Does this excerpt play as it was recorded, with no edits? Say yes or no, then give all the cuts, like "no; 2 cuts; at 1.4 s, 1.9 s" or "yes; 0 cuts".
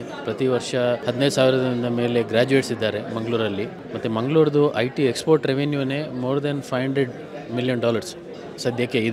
no; 2 cuts; at 1.0 s, 3.8 s